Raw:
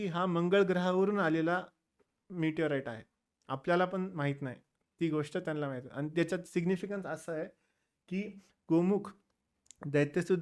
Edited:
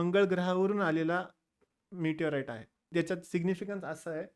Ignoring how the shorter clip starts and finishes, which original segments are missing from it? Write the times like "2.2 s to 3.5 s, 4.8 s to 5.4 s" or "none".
3.3 s to 6.1 s